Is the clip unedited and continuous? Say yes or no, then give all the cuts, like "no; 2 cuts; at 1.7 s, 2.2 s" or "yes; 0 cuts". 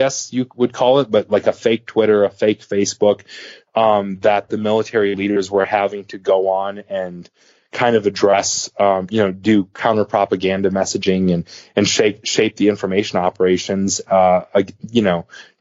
yes; 0 cuts